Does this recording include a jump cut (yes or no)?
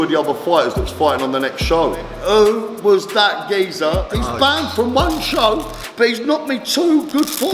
yes